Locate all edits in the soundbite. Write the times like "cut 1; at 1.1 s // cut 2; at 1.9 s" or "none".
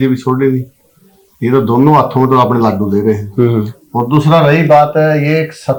none